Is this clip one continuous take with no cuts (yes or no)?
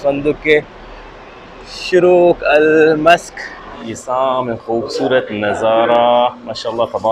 no